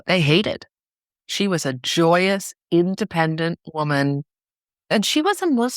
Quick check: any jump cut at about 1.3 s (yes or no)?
yes